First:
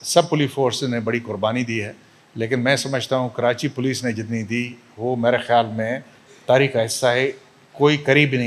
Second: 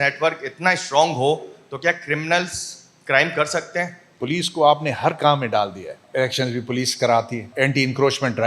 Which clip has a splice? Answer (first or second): second